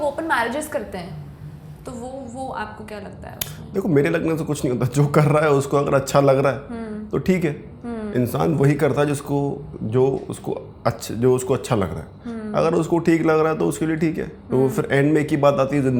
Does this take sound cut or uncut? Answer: uncut